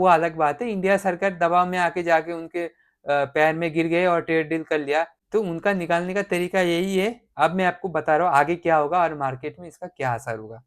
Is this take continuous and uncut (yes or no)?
no